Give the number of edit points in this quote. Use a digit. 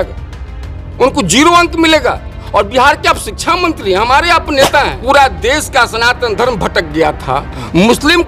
1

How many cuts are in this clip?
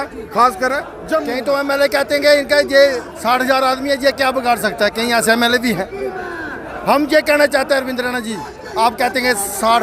1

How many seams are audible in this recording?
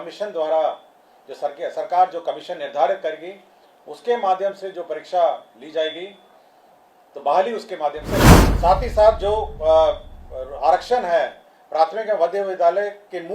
1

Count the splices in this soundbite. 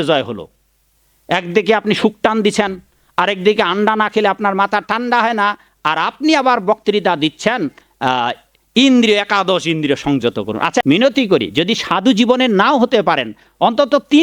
1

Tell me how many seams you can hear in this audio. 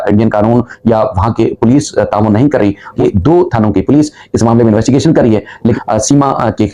2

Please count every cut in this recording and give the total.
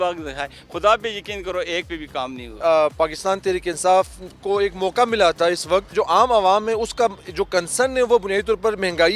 2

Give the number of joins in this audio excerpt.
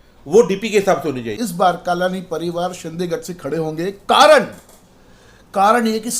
1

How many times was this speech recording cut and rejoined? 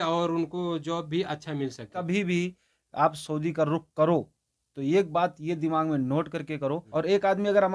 2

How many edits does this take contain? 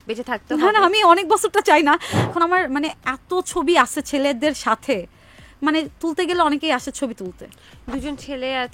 1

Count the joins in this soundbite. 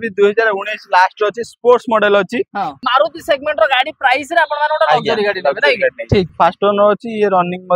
2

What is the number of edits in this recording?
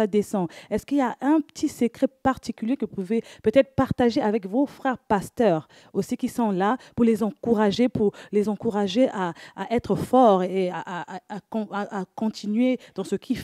0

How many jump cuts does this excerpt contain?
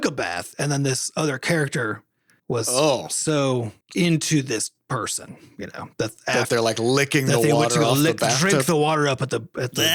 0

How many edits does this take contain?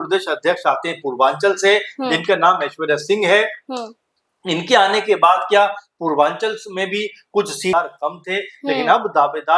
1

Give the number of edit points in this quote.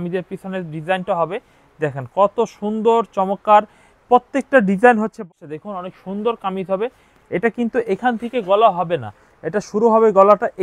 1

